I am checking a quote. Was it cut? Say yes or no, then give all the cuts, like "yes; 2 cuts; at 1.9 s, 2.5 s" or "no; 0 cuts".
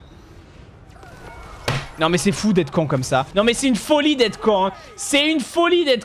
no; 0 cuts